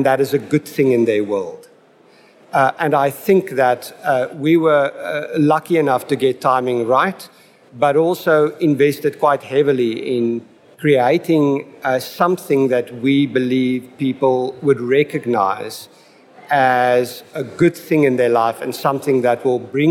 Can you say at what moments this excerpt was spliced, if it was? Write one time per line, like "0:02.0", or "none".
none